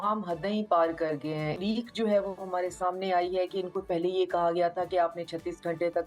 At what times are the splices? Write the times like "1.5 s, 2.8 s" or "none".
1.6 s